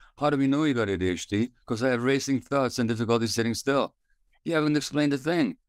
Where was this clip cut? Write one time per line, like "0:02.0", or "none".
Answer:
none